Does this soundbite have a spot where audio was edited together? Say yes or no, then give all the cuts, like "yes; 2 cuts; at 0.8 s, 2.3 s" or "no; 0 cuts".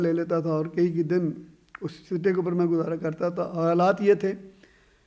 no; 0 cuts